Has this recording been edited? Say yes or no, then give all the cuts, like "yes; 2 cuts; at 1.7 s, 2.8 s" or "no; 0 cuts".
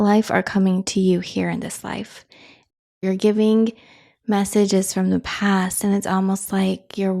yes; 1 cut; at 2.7 s